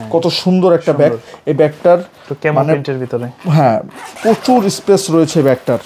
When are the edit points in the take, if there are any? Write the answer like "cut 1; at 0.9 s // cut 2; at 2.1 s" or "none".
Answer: none